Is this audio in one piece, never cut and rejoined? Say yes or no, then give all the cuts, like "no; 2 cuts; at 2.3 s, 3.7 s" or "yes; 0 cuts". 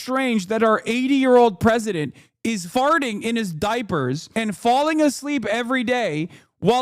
no; 1 cut; at 2.6 s